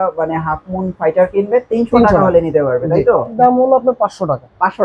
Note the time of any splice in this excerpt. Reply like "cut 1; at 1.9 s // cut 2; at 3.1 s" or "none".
cut 1; at 3.3 s